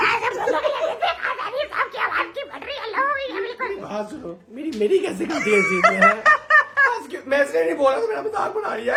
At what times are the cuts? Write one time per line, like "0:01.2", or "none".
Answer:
none